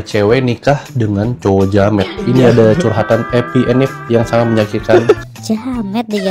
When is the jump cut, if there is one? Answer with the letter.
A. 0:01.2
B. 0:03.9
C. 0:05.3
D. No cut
C